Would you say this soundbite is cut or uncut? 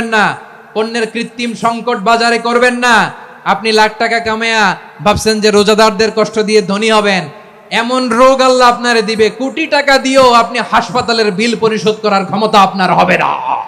uncut